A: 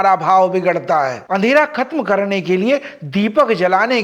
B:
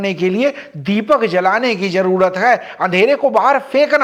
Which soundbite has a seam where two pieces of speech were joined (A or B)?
A